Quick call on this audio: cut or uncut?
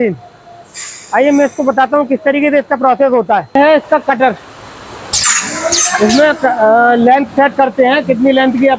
cut